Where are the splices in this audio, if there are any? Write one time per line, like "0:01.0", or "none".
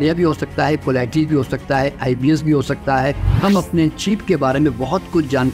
0:03.3

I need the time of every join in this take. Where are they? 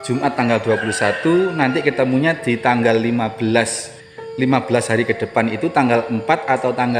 none

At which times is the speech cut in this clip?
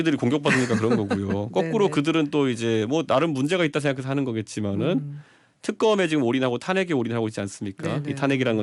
none

